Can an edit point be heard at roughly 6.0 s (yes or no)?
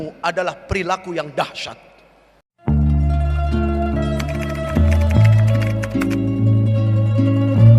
no